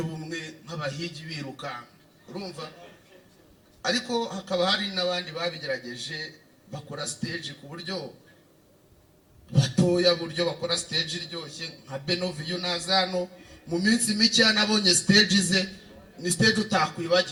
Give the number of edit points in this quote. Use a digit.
0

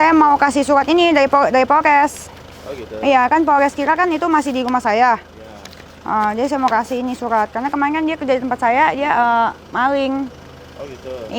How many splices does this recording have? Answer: 0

